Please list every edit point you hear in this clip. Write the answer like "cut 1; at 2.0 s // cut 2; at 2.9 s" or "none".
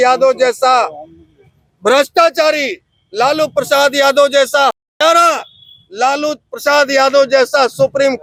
none